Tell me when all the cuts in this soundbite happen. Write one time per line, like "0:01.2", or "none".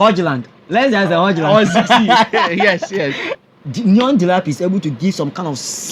0:03.3